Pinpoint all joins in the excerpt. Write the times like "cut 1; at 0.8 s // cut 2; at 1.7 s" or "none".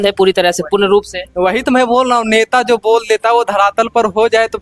none